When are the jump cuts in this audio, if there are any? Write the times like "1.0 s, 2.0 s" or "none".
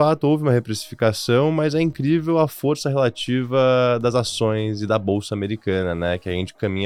none